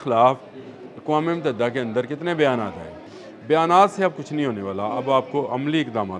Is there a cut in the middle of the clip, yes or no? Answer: yes